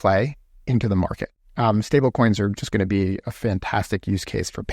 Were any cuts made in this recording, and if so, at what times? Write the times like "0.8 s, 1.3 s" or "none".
1.3 s